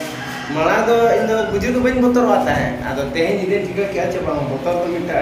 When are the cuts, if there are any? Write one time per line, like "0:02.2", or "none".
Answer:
none

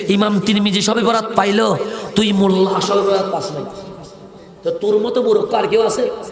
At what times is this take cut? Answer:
none

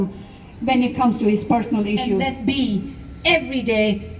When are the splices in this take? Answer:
0:02.4

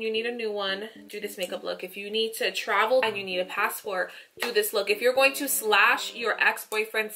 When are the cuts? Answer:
0:03.0

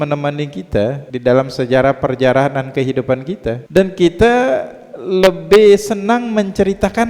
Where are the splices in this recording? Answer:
0:01.1
0:03.6

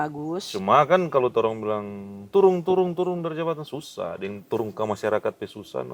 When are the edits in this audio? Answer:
none

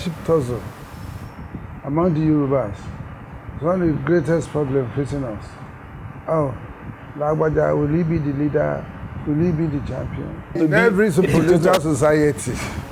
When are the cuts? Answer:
0:10.6

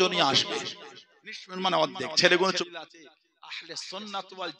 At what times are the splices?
0:02.5

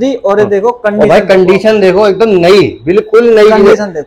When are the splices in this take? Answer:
none

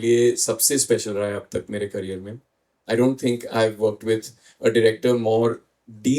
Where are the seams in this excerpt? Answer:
none

